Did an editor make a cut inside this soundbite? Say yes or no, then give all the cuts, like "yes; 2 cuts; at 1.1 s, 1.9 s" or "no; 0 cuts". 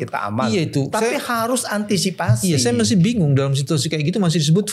no; 0 cuts